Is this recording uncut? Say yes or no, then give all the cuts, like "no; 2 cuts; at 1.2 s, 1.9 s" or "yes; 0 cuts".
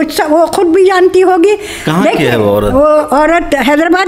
yes; 0 cuts